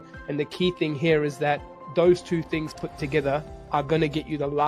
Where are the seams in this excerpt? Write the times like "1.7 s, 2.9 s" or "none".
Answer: 1.8 s, 3.6 s